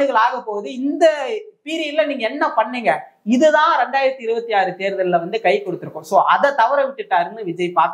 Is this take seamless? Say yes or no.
yes